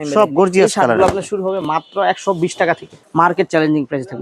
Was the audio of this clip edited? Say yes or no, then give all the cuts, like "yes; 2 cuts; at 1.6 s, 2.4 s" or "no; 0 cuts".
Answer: yes; 1 cut; at 3.0 s